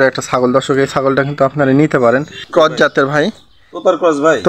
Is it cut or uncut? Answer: cut